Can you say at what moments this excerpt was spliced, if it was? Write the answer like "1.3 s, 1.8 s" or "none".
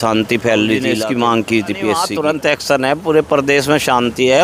0.9 s, 2.1 s